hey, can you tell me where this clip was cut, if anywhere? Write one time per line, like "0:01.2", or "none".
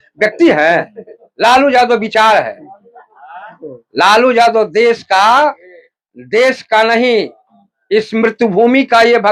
none